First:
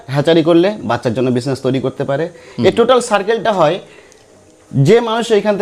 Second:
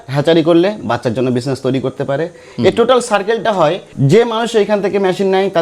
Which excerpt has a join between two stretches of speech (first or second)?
second